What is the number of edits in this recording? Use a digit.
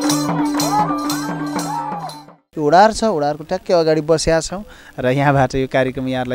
1